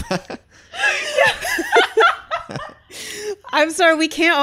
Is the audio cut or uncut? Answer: uncut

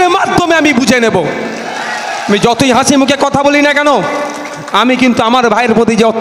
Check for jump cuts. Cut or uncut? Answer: uncut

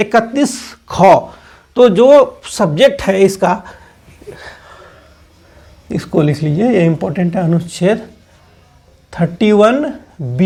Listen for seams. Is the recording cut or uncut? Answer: uncut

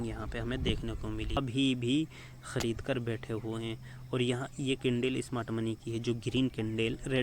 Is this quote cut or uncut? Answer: cut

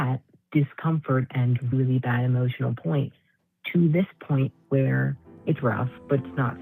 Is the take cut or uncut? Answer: cut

